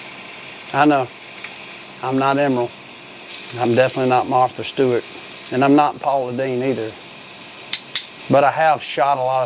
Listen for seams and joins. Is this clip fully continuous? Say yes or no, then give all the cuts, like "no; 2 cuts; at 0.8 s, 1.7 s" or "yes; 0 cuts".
yes; 0 cuts